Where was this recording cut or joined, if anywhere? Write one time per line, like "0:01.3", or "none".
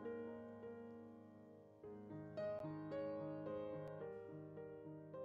none